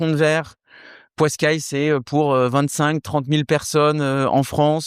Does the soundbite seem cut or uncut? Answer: uncut